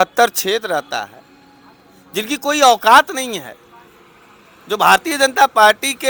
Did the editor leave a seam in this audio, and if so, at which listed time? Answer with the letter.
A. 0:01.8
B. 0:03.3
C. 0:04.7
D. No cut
D